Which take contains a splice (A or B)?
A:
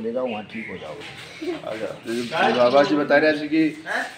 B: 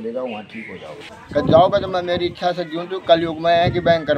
B